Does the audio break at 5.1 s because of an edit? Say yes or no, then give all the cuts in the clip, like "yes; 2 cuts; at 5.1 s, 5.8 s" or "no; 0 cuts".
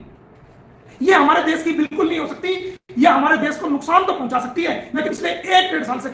yes; 1 cut; at 5.1 s